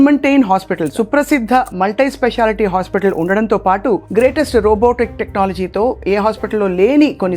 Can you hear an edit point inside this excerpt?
yes; 1 cut; at 0.9 s

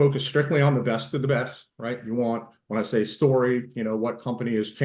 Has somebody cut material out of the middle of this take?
no; 0 cuts

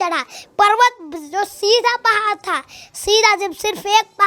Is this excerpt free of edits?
yes; 0 cuts

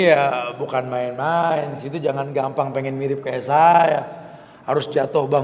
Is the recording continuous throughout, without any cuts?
yes; 0 cuts

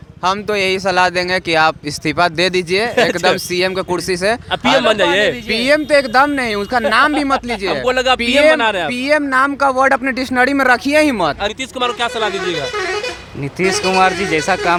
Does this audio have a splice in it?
no; 0 cuts

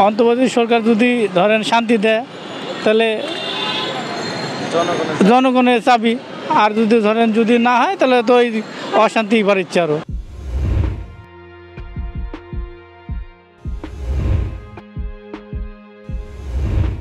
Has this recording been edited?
no; 0 cuts

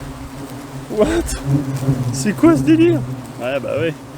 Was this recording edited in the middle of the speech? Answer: no; 0 cuts

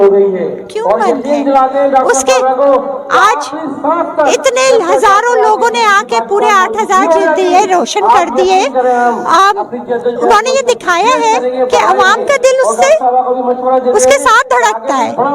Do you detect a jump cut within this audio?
no; 0 cuts

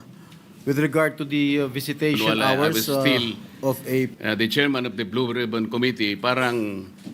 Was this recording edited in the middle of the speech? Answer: yes; 1 cut; at 4.1 s

